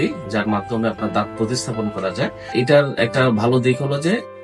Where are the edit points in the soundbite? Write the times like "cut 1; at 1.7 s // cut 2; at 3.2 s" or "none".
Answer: cut 1; at 2.5 s

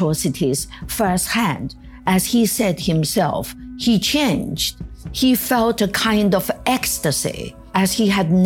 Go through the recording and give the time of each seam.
cut 1; at 7.5 s

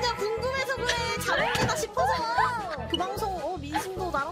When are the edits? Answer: none

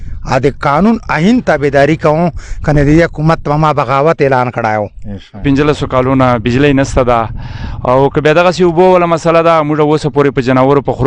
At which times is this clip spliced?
cut 1; at 5.4 s

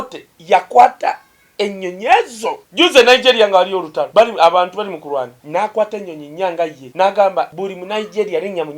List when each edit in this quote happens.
cut 1; at 2.6 s // cut 2; at 4.0 s // cut 3; at 5.4 s // cut 4; at 6.8 s // cut 5; at 7.5 s

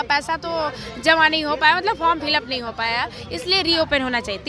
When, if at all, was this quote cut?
none

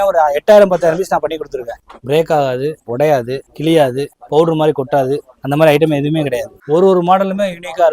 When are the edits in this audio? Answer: cut 1; at 1.9 s // cut 2; at 6.5 s

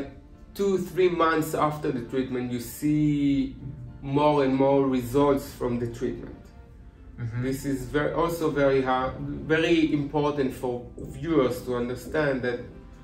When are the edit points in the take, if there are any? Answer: none

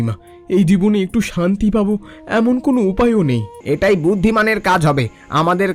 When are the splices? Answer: cut 1; at 3.5 s

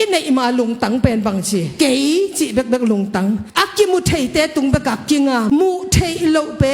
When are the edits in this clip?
cut 1; at 5.5 s

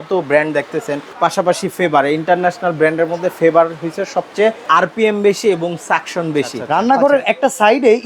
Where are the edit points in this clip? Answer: cut 1; at 1.0 s // cut 2; at 4.6 s // cut 3; at 6.6 s

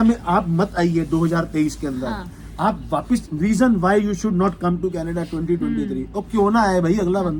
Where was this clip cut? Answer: none

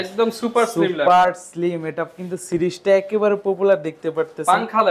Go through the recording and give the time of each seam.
none

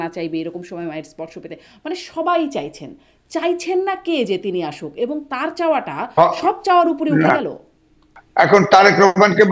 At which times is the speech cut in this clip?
cut 1; at 8.2 s

